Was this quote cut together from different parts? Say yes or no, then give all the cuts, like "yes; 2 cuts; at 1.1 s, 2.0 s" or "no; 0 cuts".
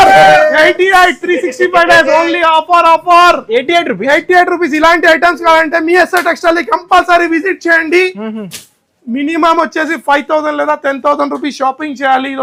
no; 0 cuts